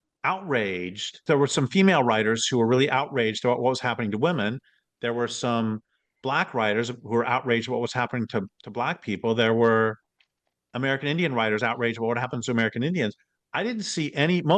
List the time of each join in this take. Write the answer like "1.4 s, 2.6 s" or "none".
1.1 s

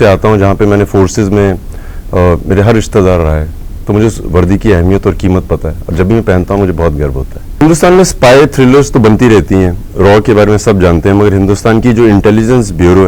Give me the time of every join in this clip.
7.6 s

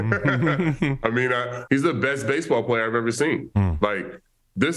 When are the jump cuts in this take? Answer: 1.5 s

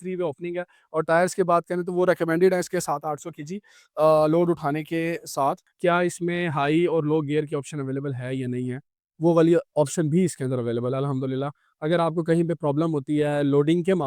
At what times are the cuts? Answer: 5.7 s

